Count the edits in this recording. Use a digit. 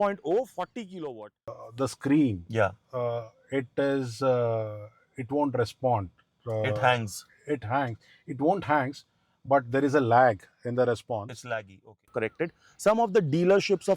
2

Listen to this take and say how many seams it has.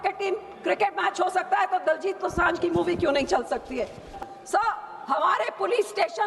1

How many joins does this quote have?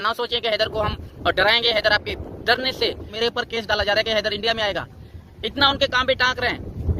1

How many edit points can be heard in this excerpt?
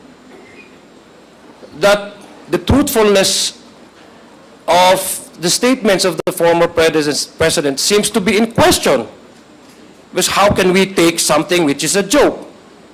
0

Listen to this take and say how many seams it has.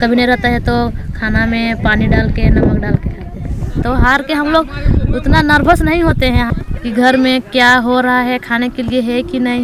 2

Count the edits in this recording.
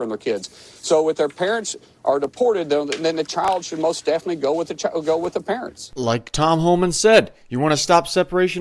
1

